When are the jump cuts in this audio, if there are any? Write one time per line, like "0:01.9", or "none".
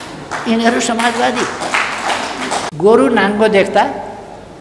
0:02.7

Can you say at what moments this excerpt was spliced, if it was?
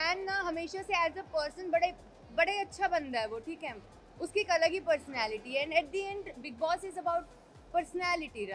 none

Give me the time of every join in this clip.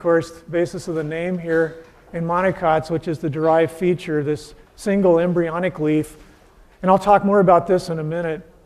0:00.9

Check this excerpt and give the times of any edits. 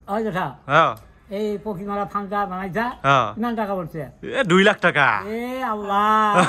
none

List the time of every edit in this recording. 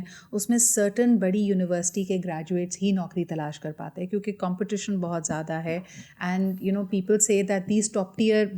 none

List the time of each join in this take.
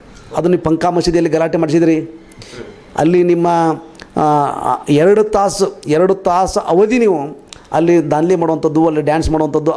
none

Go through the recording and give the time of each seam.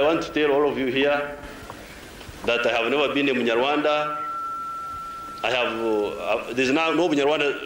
none

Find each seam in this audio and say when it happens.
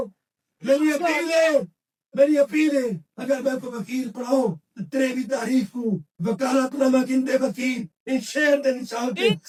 none

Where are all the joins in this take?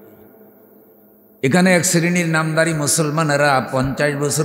none

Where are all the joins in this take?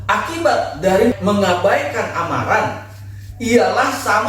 0:01.2

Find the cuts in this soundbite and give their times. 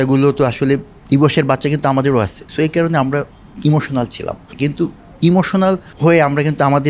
0:02.4
0:04.5
0:05.9

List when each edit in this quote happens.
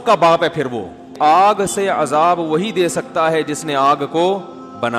0:01.1

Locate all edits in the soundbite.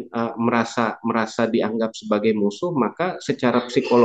none

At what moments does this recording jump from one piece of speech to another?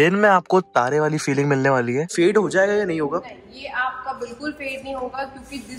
0:02.1

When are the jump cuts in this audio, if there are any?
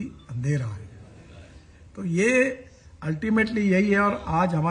none

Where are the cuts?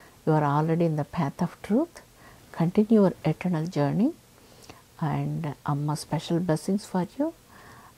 none

